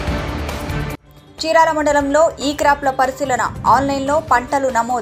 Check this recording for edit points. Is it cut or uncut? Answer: cut